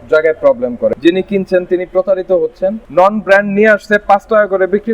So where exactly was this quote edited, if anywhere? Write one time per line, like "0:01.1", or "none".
0:00.9
0:02.8